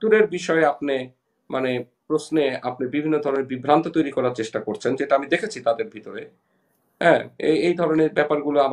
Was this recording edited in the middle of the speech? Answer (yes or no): no